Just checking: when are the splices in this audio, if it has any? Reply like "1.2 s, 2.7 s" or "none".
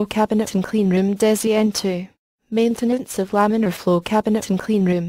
3.8 s